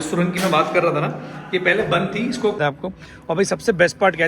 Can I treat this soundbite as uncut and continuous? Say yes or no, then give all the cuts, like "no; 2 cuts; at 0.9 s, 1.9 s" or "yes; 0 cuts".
no; 1 cut; at 2.6 s